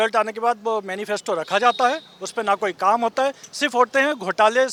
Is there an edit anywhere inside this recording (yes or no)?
no